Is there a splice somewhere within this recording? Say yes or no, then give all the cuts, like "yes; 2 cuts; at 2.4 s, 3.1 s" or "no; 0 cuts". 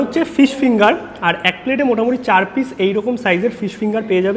no; 0 cuts